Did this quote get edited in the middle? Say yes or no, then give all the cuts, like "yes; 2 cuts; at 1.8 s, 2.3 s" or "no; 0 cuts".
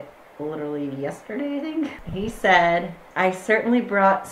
yes; 2 cuts; at 2.0 s, 3.0 s